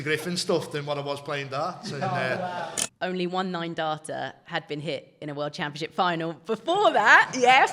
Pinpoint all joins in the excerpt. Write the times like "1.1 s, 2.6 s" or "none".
2.8 s

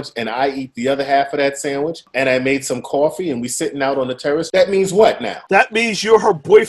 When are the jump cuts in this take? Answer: 2.1 s, 4.5 s, 5.3 s

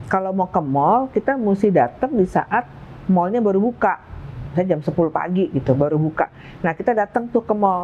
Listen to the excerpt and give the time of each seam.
none

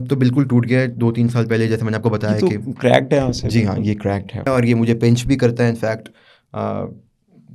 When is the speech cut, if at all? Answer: 4.5 s

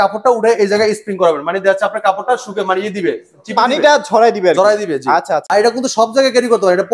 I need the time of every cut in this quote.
5.4 s

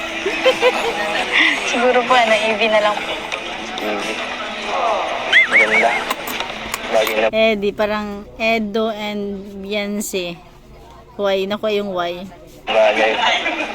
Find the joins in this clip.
1.2 s, 5.4 s

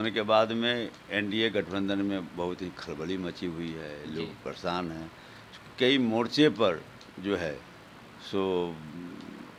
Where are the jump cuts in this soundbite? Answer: none

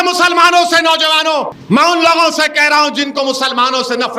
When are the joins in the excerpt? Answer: 1.6 s

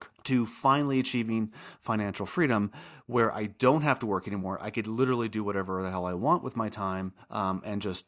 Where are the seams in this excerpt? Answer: none

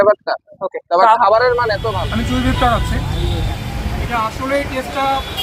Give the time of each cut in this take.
1.9 s

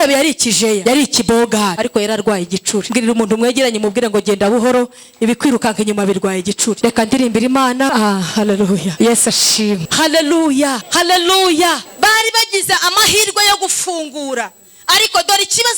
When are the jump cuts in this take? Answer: 0.8 s, 1.8 s, 2.9 s, 6.8 s, 7.9 s, 8.9 s, 9.9 s, 10.8 s, 11.9 s

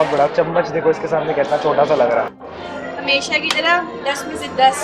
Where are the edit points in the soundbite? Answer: 2.4 s

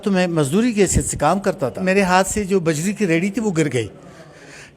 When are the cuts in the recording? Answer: 1.8 s

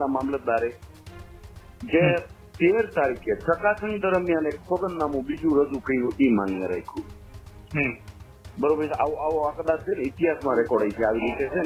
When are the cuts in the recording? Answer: none

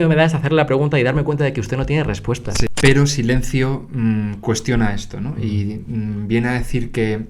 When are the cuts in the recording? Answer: 2.7 s

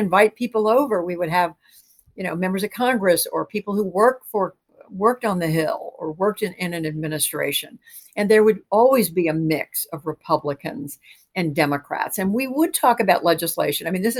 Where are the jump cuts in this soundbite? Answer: none

